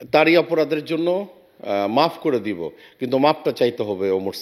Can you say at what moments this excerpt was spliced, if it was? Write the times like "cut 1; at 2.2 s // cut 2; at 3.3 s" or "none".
none